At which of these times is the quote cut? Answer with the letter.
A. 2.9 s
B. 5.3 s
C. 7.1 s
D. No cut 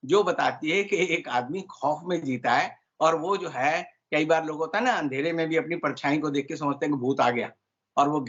D